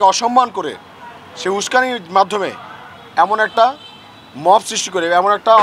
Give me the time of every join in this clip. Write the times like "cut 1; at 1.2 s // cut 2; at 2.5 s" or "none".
none